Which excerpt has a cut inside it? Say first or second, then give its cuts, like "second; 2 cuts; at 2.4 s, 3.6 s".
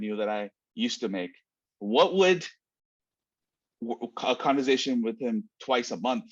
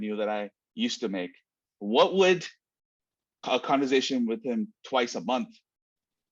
second; 1 cut; at 3.3 s